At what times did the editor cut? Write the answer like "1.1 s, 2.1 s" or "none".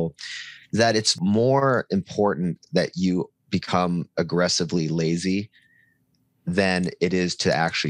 1.1 s